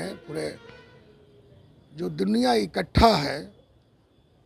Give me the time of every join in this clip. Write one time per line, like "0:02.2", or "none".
none